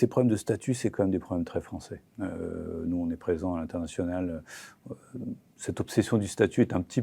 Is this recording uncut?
yes; 0 cuts

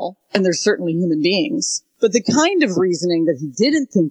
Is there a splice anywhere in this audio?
yes; 1 cut; at 1.8 s

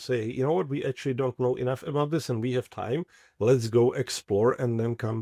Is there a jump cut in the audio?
no; 0 cuts

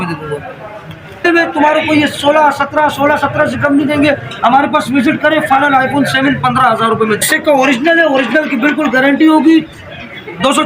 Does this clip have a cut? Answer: yes; 2 cuts; at 1.2 s, 7.3 s

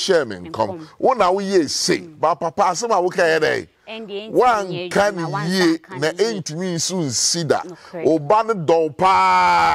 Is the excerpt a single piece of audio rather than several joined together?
yes; 0 cuts

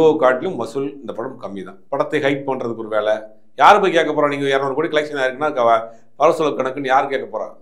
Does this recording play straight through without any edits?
no; 1 cut; at 1.7 s

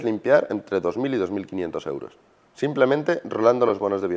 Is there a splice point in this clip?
no; 0 cuts

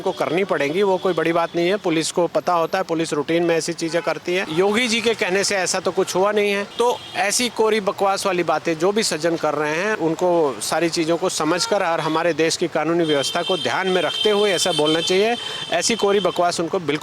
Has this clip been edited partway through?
yes; 3 cuts; at 4.5 s, 6.7 s, 9.9 s

